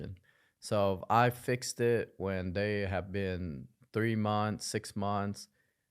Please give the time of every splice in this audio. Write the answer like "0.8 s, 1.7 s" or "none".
none